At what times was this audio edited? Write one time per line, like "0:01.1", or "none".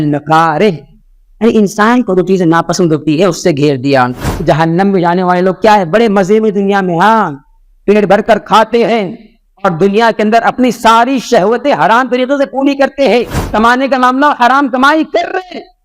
0:04.3
0:13.4